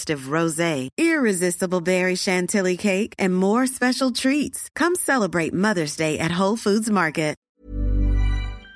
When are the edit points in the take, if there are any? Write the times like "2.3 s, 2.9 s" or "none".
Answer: 7.4 s